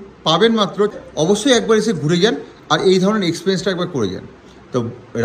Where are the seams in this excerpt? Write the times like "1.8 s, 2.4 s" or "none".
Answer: 0.9 s

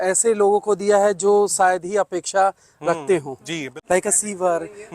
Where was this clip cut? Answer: 3.6 s

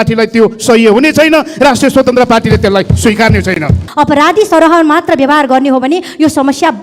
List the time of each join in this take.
3.8 s

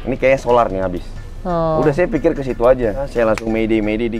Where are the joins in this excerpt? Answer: 3.1 s

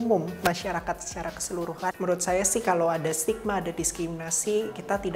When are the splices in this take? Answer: 1.9 s

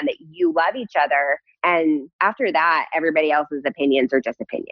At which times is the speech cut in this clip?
1.5 s, 2.1 s

